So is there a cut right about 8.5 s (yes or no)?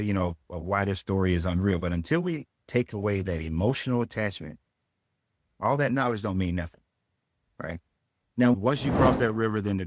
yes